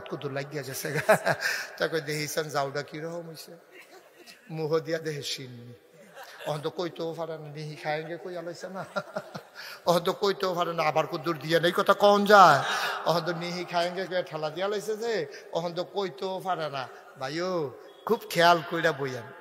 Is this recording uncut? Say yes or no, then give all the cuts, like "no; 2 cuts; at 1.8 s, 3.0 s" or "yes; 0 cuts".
yes; 0 cuts